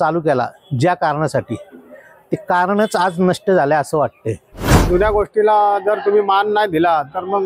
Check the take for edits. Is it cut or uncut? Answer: cut